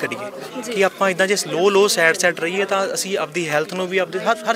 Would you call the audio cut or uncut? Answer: uncut